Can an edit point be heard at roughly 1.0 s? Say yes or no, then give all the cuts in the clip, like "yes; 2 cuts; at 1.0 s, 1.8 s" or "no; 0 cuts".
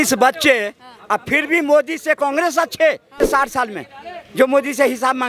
no; 1 cut; at 3.2 s